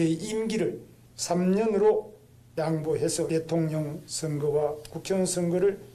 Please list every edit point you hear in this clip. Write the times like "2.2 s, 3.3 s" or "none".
3.3 s